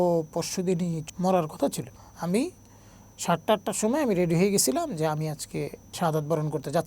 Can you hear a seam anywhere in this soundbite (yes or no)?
yes